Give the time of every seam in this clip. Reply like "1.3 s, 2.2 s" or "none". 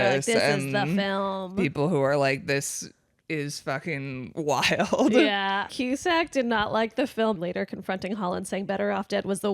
5.7 s, 7.4 s